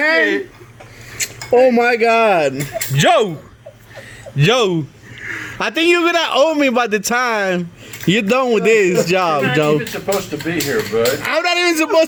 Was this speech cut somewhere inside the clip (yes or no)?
no